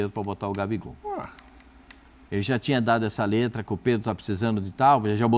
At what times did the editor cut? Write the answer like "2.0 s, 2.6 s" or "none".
none

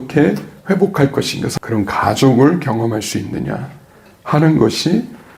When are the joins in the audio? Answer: 1.5 s

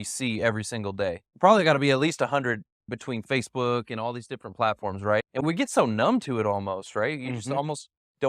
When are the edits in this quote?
1.3 s, 2.9 s, 5.4 s

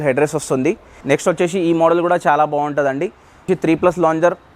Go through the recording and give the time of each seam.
0.9 s, 3.5 s

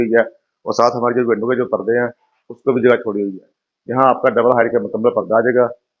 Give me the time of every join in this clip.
none

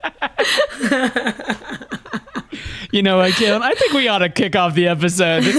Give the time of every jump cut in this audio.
none

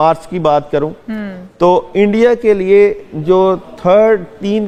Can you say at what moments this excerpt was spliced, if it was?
none

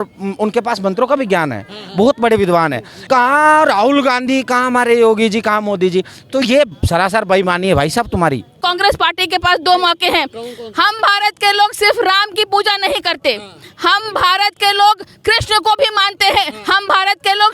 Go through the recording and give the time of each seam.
2.9 s, 8.6 s

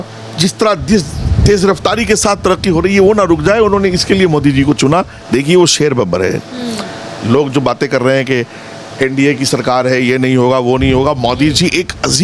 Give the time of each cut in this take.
5.2 s

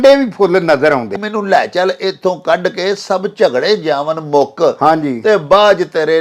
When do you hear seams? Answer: 1.1 s

